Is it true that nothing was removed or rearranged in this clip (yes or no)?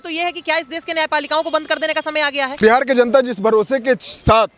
no